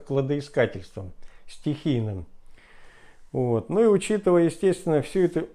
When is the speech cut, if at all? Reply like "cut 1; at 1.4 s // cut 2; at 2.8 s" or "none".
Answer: none